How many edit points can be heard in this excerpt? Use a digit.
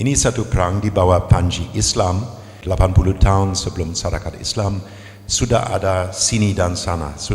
1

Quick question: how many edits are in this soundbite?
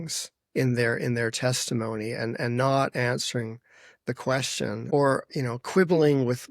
1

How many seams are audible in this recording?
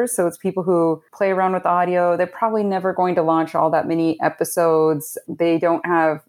2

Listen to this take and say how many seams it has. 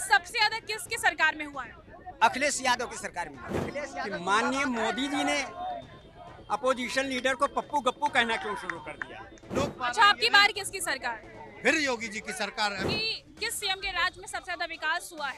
3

